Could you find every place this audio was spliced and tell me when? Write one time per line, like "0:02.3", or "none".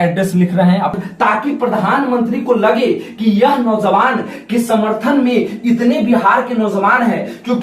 0:00.9